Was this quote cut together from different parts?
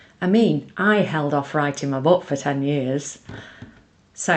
no; 0 cuts

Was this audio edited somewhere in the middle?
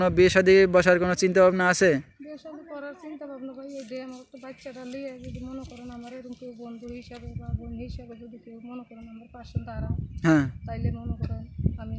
no; 0 cuts

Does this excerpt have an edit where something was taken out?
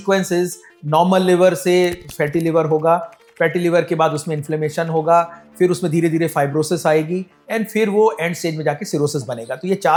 no; 0 cuts

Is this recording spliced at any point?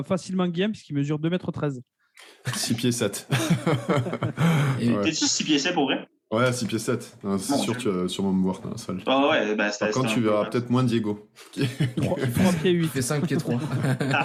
no; 0 cuts

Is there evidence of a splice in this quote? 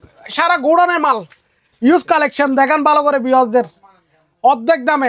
no; 0 cuts

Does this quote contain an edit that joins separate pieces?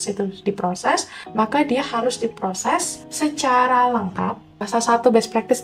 yes; 3 cuts; at 1.2 s, 3.0 s, 4.6 s

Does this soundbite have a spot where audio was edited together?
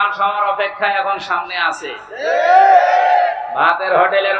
no; 0 cuts

